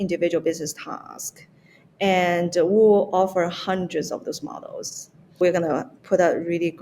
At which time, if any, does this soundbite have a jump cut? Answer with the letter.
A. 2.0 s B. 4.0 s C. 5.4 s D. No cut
C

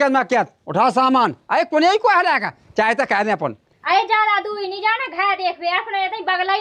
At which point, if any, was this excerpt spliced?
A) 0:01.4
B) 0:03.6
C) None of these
B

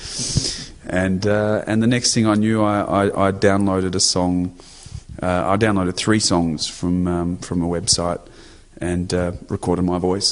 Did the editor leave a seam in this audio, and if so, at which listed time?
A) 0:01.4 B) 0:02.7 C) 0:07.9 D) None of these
C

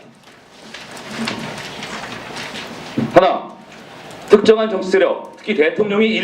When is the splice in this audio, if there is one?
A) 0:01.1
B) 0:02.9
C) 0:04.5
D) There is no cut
B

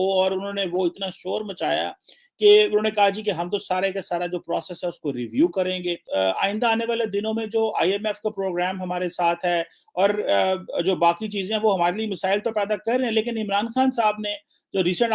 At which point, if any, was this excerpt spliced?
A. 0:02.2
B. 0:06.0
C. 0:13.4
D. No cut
B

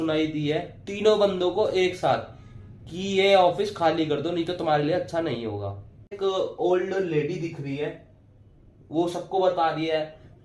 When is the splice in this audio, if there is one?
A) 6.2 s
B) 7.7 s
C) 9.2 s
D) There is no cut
A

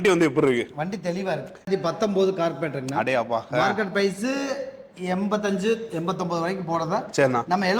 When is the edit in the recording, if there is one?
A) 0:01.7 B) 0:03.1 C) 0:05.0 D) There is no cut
A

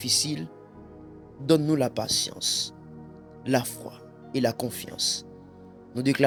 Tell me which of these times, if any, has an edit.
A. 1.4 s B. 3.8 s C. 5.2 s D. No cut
D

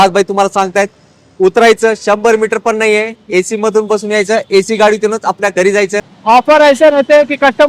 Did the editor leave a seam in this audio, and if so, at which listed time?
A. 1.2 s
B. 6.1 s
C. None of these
B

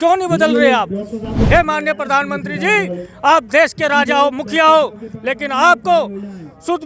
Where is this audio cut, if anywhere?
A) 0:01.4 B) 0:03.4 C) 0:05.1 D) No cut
A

